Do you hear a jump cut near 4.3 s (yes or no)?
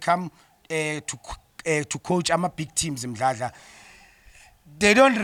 no